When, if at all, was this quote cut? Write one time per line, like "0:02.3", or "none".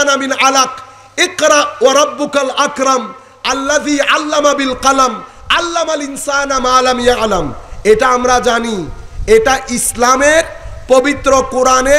none